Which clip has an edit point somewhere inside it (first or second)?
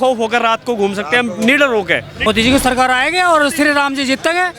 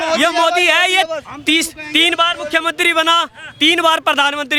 first